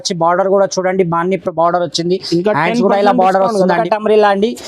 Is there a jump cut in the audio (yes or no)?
yes